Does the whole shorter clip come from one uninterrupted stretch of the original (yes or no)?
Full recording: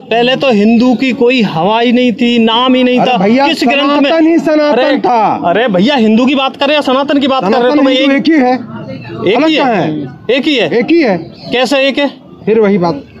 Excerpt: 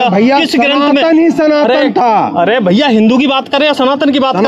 yes